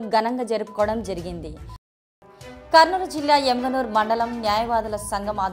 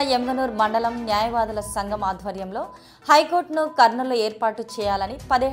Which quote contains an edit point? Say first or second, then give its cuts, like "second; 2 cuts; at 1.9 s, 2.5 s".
first; 1 cut; at 1.8 s